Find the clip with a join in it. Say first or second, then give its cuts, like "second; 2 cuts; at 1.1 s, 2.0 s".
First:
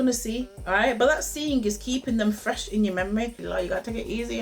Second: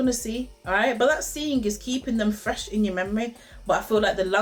first; 1 cut; at 3.4 s